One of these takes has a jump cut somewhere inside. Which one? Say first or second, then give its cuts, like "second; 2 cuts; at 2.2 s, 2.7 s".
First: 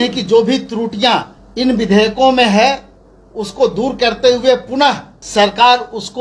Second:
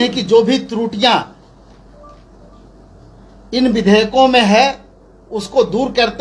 first; 2 cuts; at 1.4 s, 5.1 s